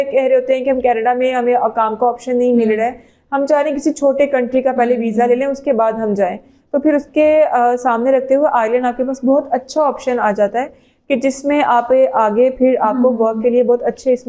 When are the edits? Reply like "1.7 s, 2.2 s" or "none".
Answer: none